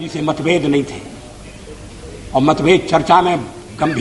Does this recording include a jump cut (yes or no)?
no